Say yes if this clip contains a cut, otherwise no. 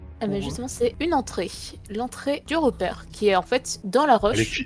yes